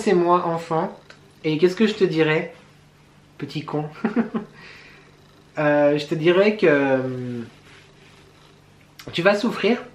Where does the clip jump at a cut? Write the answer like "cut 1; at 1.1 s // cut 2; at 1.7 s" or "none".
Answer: none